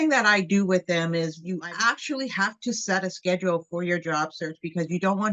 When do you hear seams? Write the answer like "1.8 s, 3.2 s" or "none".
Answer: 1.5 s